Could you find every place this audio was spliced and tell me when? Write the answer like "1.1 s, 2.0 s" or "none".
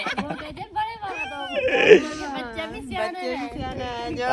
none